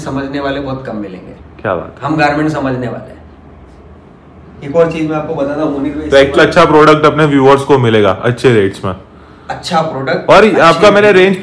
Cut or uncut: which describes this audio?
uncut